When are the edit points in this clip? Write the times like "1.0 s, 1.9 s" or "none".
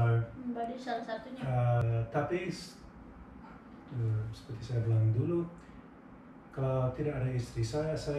1.8 s

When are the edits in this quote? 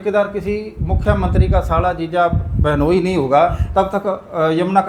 none

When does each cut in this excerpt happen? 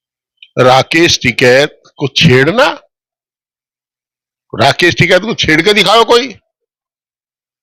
none

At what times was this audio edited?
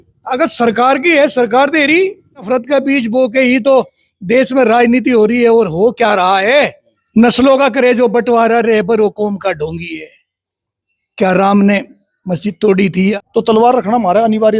2.5 s, 7.0 s, 13.2 s

